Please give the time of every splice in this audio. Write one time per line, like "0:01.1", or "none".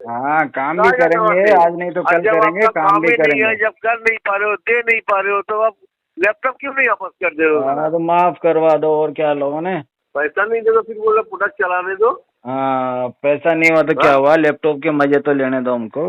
0:10.0